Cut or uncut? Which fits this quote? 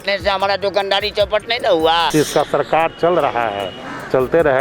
cut